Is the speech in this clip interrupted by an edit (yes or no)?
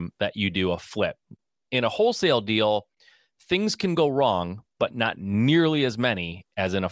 no